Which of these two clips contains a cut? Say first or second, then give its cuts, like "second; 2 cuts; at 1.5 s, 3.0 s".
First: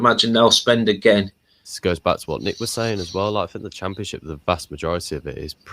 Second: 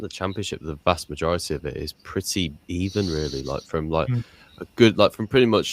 first; 1 cut; at 1.7 s